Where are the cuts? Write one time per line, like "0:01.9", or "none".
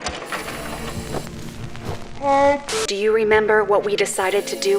0:02.7